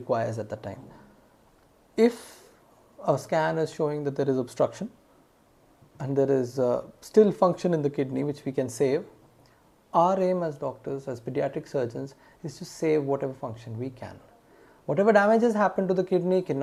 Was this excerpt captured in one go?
yes; 0 cuts

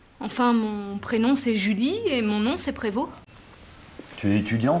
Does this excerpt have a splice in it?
yes; 1 cut; at 3.2 s

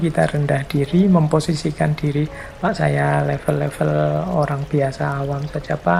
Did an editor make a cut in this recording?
no; 0 cuts

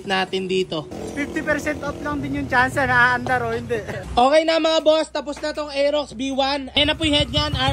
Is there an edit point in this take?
yes; 3 cuts; at 0.9 s, 4.0 s, 6.8 s

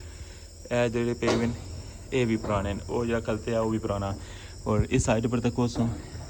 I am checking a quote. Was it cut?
no; 0 cuts

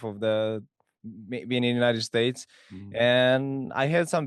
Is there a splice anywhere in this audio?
no; 0 cuts

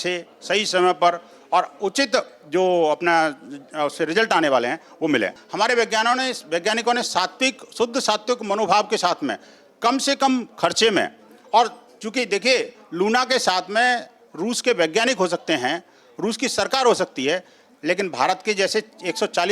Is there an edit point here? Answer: yes; 1 cut; at 5.4 s

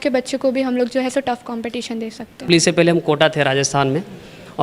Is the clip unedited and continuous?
no; 1 cut; at 2.5 s

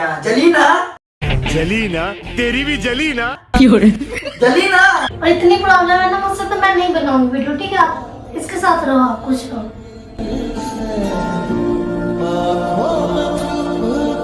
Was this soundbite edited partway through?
yes; 1 cut; at 5.1 s

